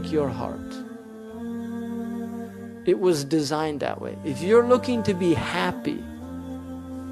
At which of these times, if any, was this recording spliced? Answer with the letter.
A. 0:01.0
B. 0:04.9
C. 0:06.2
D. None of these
D